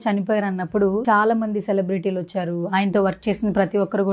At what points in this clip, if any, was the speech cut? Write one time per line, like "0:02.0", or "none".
0:01.0